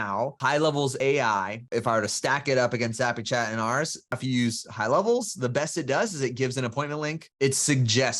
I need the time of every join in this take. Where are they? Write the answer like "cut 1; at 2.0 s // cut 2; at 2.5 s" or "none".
cut 1; at 1.6 s // cut 2; at 4.1 s